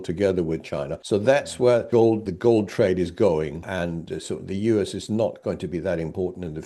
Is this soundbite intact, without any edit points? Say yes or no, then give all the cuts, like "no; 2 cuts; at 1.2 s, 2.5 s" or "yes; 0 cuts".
no; 3 cuts; at 0.9 s, 2.0 s, 3.8 s